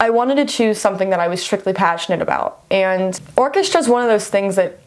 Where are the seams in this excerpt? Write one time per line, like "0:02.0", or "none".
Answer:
0:03.2